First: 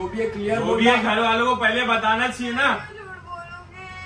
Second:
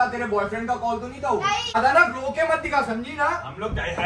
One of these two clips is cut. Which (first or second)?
second